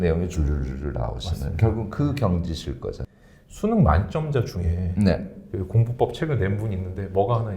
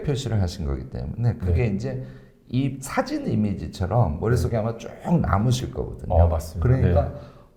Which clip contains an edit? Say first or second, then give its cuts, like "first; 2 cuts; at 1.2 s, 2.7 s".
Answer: first; 1 cut; at 3.1 s